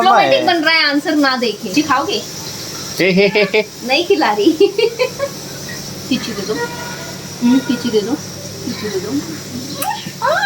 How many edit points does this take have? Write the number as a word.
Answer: one